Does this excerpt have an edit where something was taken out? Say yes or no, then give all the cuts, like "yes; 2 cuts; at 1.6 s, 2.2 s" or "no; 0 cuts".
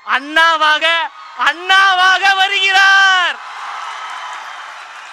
no; 0 cuts